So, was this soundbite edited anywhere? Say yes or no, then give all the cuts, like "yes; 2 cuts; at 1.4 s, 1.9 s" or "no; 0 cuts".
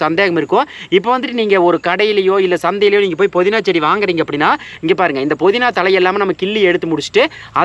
no; 0 cuts